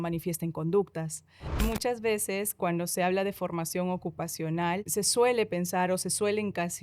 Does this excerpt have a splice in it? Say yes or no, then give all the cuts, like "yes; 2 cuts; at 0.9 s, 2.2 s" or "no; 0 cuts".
yes; 2 cuts; at 1.6 s, 4.8 s